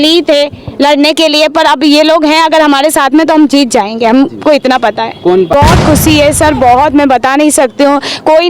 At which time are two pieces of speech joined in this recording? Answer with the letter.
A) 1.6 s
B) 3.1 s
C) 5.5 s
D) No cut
C